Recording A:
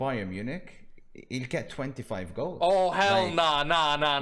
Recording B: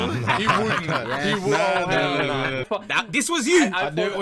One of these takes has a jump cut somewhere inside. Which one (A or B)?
B